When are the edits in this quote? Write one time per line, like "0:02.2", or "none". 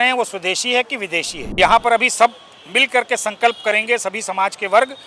0:01.6